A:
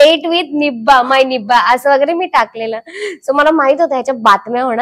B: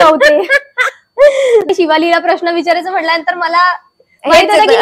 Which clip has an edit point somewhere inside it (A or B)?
B